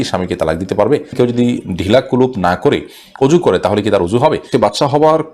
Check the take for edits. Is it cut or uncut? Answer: cut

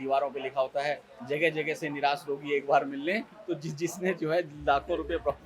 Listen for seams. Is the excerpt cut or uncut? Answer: uncut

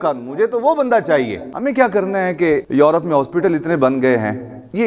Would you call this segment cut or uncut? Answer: cut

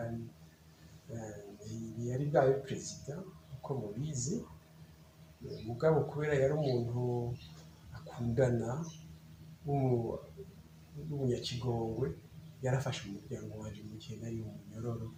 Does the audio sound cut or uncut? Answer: uncut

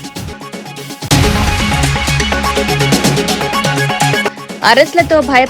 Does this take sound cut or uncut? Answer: cut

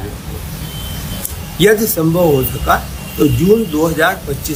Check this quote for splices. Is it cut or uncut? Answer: uncut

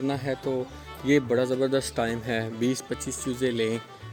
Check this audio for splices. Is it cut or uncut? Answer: uncut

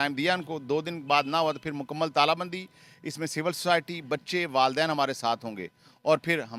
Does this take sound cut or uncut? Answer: uncut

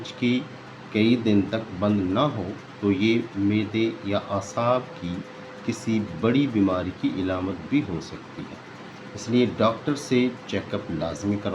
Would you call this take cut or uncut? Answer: uncut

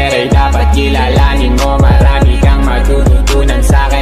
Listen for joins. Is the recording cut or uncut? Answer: uncut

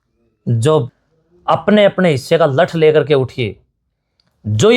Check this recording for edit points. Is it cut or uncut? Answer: cut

